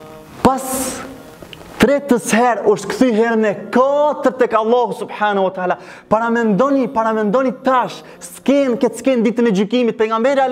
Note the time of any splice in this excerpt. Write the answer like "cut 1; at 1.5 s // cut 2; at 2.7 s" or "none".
none